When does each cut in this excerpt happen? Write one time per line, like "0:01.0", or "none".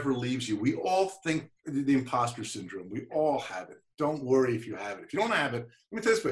none